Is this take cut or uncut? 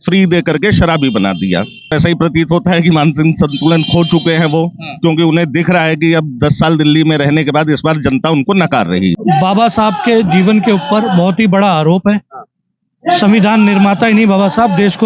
cut